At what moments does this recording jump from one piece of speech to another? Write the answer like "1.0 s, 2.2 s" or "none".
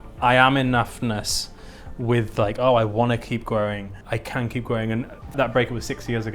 3.9 s, 5.3 s